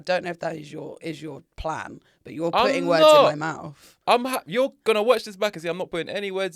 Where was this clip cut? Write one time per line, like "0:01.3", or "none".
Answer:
none